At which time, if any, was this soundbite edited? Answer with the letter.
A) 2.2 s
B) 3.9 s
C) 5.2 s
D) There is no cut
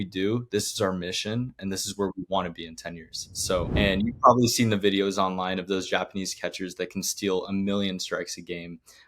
B